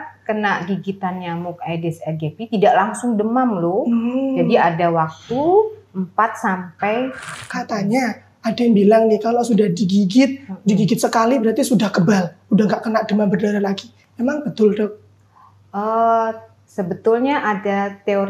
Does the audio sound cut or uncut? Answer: cut